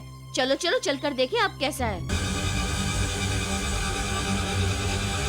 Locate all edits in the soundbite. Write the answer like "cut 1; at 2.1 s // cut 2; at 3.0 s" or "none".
cut 1; at 2.1 s